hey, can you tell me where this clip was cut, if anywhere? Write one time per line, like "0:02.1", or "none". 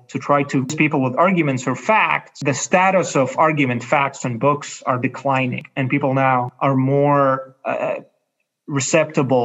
0:00.7
0:02.3
0:05.6
0:06.5